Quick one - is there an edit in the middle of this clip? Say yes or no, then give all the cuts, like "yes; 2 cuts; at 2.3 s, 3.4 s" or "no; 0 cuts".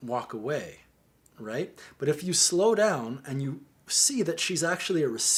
no; 0 cuts